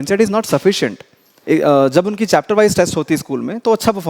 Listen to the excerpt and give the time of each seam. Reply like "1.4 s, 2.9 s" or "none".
1.3 s